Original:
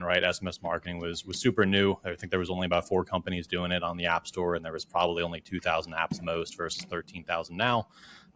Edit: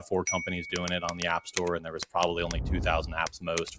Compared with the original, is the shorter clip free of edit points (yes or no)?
yes